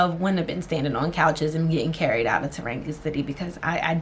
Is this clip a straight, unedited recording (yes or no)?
yes